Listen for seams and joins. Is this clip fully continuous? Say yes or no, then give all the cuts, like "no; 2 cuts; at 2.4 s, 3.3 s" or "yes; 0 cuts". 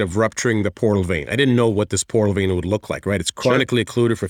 yes; 0 cuts